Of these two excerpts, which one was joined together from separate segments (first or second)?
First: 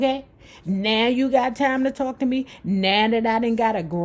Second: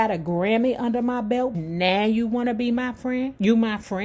second